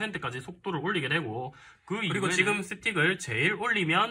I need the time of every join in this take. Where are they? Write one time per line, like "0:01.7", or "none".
0:02.1

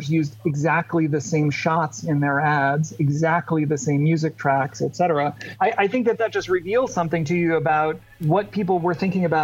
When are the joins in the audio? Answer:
0:05.5
0:08.1

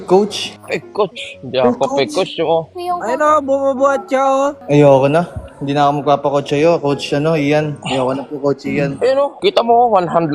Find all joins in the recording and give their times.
none

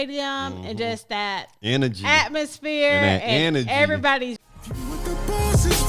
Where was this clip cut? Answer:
0:04.4

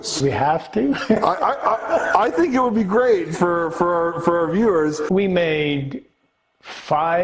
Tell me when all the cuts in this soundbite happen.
0:05.0

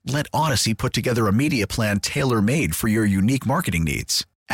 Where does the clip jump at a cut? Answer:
none

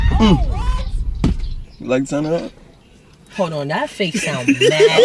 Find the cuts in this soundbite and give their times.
0:01.5

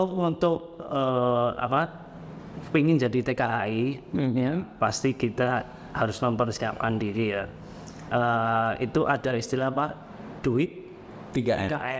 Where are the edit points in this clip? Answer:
none

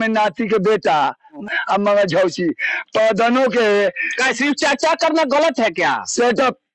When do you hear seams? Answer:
0:01.4

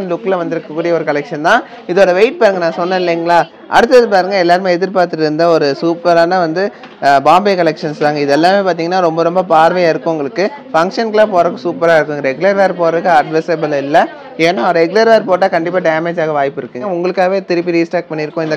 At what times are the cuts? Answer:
0:03.6
0:16.9

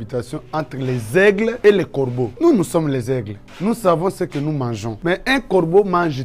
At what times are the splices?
none

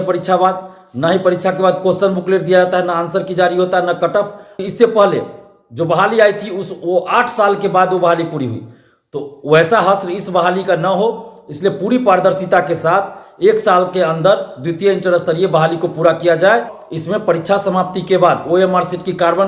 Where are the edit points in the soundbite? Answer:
0:04.6
0:16.8

